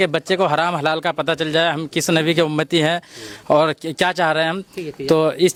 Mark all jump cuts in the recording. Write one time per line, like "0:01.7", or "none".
none